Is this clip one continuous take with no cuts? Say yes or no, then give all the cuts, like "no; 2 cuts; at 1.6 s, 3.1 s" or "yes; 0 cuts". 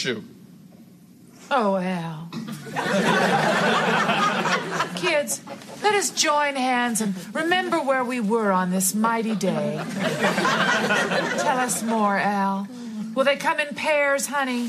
yes; 0 cuts